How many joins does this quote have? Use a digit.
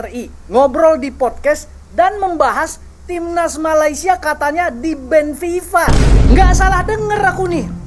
0